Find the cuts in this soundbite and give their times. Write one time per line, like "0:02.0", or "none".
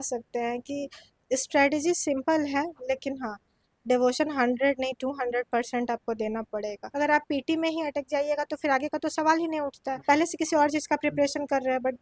0:06.8
0:10.0